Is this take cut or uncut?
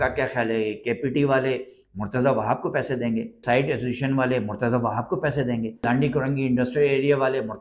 cut